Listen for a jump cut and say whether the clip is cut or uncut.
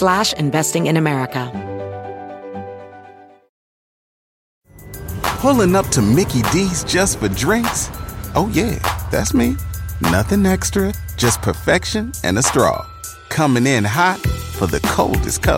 cut